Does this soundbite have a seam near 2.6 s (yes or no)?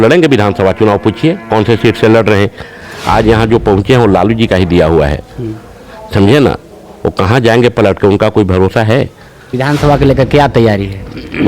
no